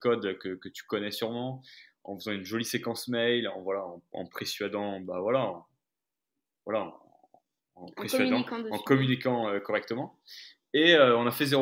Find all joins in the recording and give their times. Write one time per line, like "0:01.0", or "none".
none